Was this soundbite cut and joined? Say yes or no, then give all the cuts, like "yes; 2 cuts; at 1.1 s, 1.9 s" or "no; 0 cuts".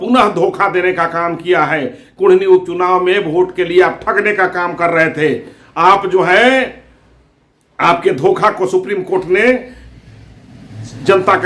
no; 0 cuts